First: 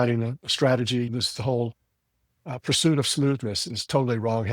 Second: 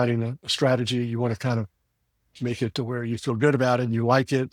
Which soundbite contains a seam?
first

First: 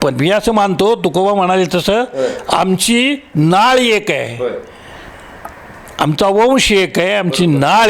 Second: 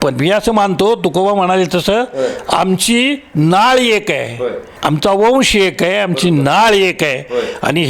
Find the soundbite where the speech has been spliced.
second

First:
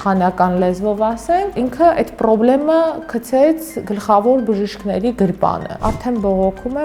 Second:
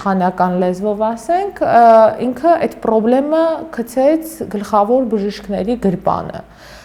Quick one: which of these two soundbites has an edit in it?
first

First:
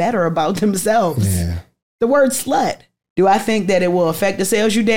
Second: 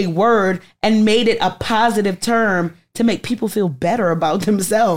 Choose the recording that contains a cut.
first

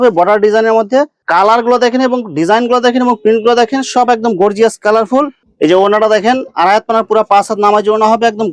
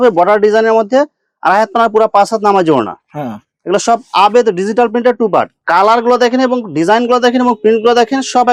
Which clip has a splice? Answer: first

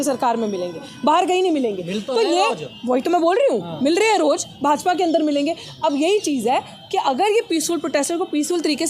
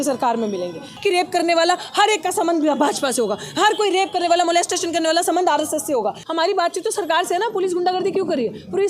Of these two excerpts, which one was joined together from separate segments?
second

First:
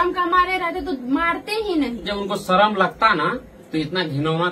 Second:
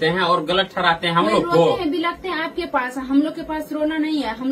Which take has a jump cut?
first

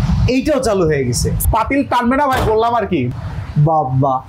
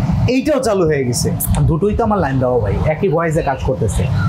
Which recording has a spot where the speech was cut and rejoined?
first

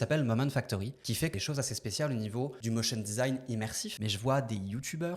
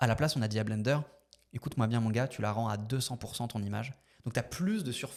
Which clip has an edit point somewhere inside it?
first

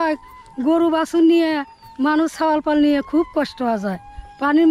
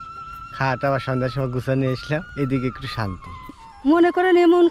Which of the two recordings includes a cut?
second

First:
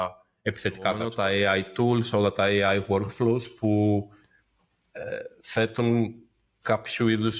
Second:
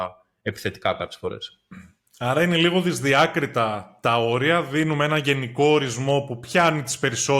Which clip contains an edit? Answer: first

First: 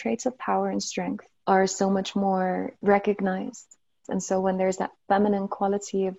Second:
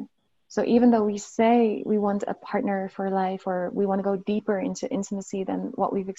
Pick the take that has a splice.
first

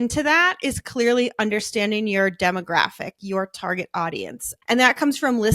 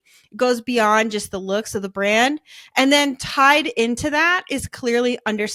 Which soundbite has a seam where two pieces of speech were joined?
first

